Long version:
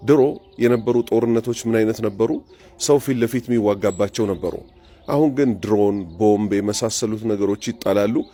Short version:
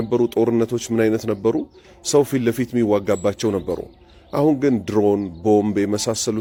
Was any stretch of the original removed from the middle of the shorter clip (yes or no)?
no